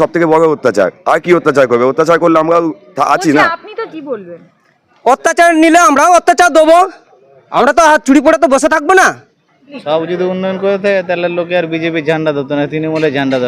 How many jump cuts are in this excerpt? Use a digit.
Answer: 2